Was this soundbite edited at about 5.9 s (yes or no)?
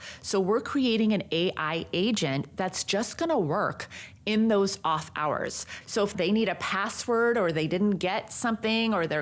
yes